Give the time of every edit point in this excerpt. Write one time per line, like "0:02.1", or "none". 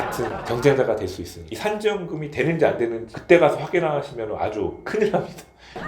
0:01.4